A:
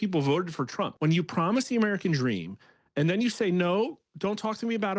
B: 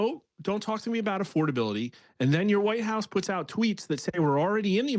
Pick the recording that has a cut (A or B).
A